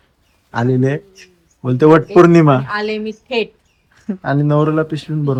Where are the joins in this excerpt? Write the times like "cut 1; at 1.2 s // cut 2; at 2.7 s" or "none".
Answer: none